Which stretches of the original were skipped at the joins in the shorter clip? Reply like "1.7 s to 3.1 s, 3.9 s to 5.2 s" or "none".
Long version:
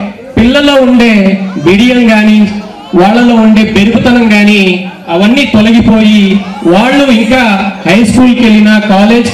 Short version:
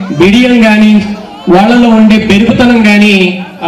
none